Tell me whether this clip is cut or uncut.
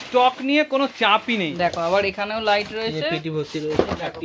cut